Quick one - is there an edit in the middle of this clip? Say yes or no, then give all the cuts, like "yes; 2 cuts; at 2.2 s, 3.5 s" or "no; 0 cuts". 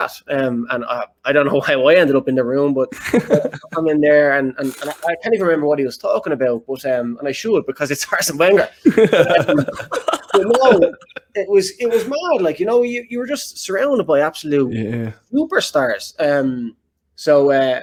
no; 0 cuts